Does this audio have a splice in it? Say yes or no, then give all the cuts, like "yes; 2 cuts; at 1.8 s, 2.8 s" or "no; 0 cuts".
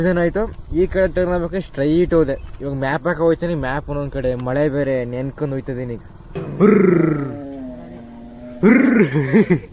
yes; 1 cut; at 6.4 s